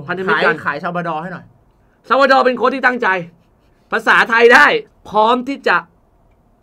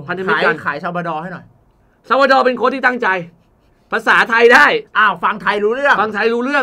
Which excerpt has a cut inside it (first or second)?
first